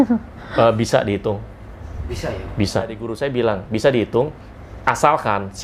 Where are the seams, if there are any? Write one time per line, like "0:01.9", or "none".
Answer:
0:03.1